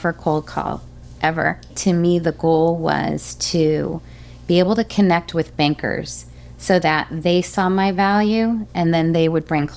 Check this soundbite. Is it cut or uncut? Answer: cut